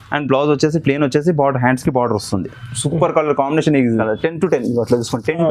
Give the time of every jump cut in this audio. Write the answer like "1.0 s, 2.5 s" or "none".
3.9 s